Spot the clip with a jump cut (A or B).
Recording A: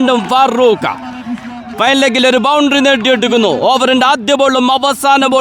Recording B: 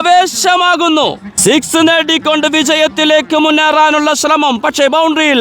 B